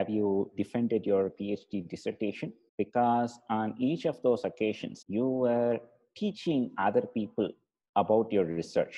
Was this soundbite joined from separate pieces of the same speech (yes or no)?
yes